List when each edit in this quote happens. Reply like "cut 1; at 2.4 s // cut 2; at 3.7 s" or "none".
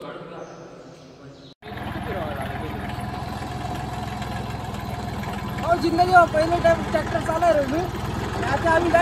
cut 1; at 1.6 s